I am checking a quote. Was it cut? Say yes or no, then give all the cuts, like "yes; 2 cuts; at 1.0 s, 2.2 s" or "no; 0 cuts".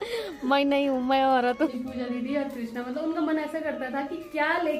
yes; 1 cut; at 1.7 s